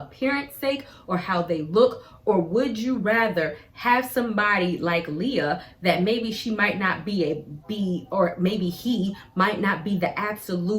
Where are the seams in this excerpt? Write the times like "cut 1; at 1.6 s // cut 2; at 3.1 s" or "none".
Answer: none